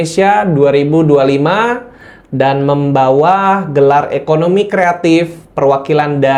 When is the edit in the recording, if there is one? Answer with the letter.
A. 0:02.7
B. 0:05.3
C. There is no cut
C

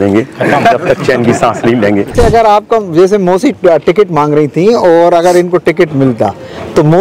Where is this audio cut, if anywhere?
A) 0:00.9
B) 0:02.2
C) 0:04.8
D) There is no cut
B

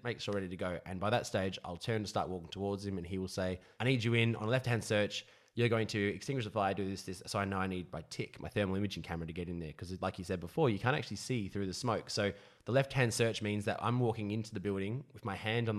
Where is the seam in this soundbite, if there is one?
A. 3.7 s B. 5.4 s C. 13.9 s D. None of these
A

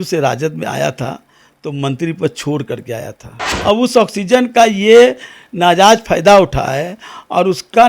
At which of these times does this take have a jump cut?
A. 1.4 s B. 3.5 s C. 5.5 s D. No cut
B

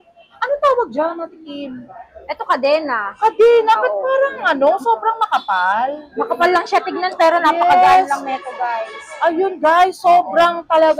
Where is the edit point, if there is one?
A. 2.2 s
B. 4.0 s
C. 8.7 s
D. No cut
D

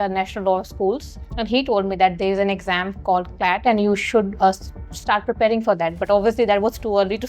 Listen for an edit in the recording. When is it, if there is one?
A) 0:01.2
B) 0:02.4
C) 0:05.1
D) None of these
A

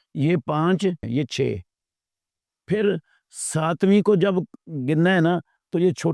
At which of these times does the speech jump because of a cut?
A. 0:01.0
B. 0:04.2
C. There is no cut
A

